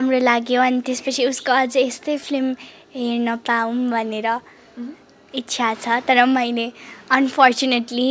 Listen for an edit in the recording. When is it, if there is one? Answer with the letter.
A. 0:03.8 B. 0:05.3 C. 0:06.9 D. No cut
D